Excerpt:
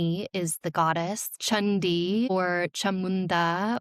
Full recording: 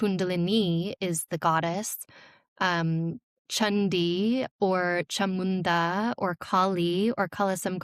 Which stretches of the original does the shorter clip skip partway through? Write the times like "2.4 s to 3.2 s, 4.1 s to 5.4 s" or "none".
2.0 s to 3.4 s, 4.4 s to 4.7 s